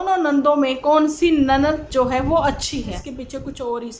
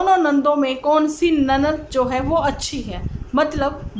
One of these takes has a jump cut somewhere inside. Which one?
first; 1 cut; at 3.1 s

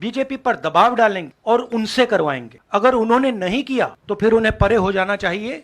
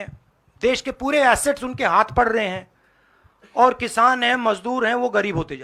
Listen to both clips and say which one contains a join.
first; 3 cuts; at 1.3 s, 2.5 s, 4.0 s

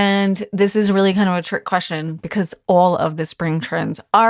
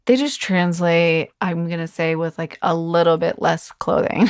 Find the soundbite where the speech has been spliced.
second; 1 cut; at 1.3 s

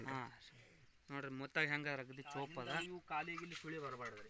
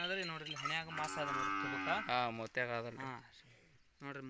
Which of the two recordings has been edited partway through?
first; 1 cut; at 2.8 s

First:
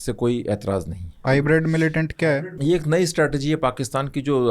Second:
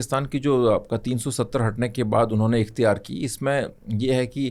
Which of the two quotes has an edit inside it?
first; 2 cuts; at 1.2 s, 2.3 s

